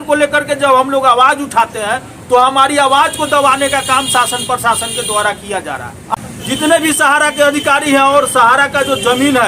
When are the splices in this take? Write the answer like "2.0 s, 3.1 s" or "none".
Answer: 6.1 s